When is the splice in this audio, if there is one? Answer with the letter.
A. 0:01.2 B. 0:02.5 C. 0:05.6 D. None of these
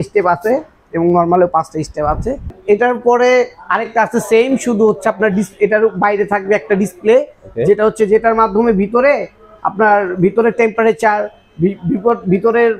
B